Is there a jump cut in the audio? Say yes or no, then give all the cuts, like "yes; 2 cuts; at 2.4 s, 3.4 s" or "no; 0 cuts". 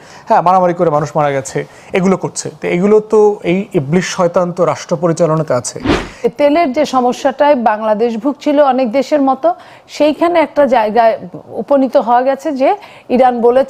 yes; 1 cut; at 6.2 s